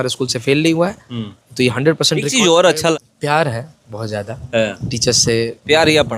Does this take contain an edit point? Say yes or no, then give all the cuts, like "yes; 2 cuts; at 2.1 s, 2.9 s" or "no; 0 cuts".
yes; 1 cut; at 2.9 s